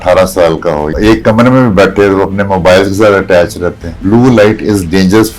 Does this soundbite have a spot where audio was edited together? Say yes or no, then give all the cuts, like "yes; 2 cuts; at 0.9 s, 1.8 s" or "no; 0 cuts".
yes; 2 cuts; at 0.9 s, 3.9 s